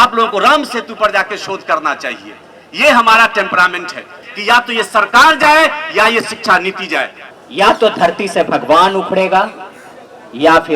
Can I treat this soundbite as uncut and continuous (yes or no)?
no